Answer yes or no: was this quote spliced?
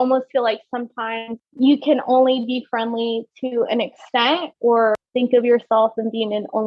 yes